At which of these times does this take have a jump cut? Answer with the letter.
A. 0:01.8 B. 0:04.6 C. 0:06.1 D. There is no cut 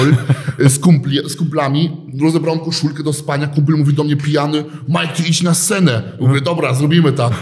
D